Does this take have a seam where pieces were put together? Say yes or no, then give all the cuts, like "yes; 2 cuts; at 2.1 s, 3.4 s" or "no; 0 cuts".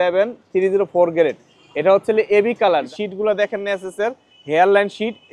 yes; 1 cut; at 2.8 s